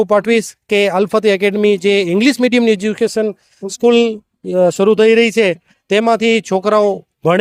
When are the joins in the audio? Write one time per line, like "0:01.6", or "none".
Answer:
none